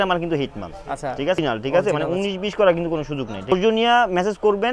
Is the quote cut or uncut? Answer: cut